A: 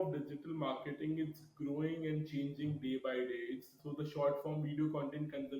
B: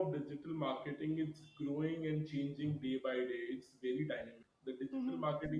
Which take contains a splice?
A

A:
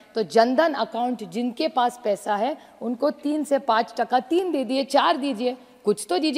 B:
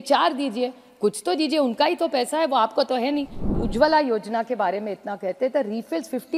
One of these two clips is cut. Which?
B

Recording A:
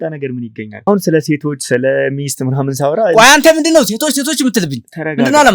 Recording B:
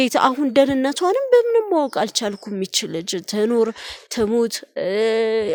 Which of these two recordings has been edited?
A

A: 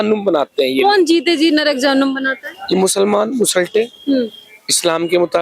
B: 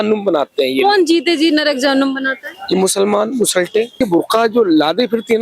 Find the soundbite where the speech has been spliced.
B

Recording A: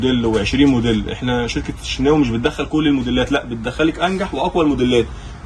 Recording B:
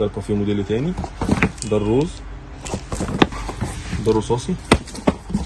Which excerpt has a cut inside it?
B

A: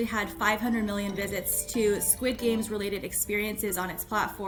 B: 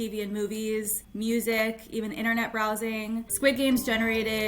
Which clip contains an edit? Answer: B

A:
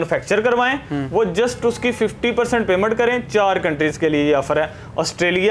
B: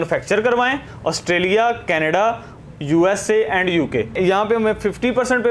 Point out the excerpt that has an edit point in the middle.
B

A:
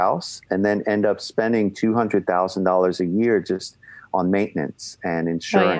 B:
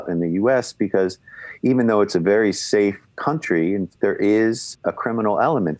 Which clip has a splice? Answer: B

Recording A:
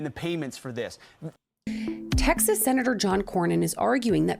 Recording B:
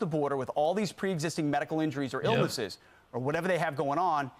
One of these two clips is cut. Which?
A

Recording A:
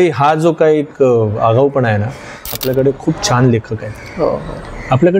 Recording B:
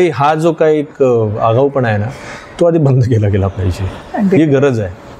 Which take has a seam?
A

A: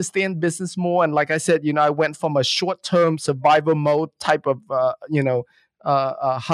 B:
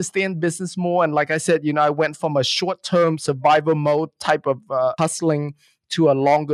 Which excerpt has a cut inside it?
B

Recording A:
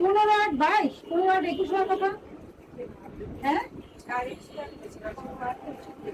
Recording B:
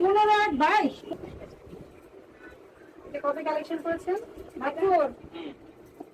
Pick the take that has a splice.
B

